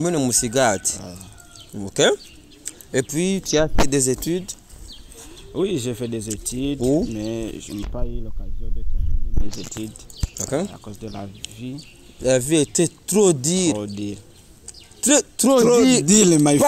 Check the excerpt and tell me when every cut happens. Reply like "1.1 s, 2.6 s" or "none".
none